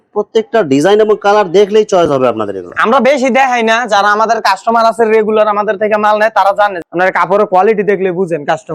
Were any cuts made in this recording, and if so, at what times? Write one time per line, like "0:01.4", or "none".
0:06.8